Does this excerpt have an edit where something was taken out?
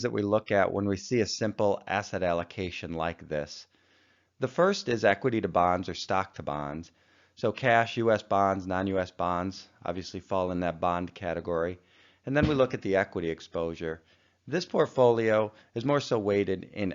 no; 0 cuts

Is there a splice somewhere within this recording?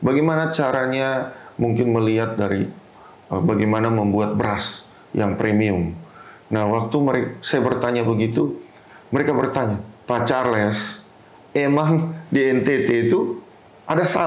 no; 0 cuts

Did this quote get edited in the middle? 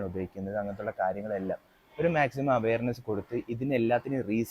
no; 0 cuts

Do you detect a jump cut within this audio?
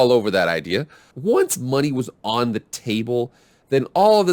yes; 1 cut; at 1.1 s

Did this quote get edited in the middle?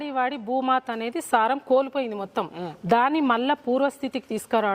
no; 0 cuts

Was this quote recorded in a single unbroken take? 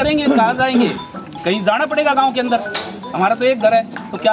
yes; 0 cuts

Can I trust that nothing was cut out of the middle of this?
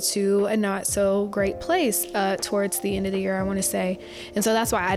yes; 0 cuts

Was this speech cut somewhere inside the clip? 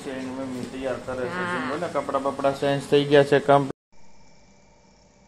yes; 1 cut; at 3.7 s

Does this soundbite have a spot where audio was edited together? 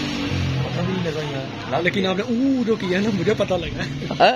no; 0 cuts

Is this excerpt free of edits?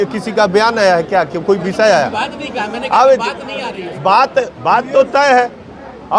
yes; 0 cuts

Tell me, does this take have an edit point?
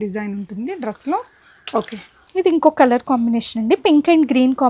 no; 0 cuts

